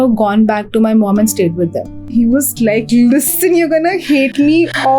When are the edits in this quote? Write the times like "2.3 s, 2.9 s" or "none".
2.1 s